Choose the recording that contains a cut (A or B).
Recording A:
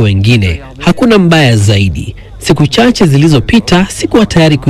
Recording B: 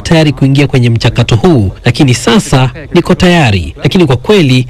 B